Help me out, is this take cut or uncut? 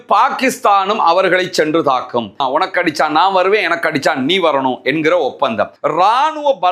cut